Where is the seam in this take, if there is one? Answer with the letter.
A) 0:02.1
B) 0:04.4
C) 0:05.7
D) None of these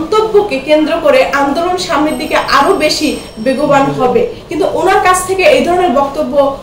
B